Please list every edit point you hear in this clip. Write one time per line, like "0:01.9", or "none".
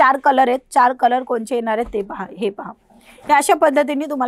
none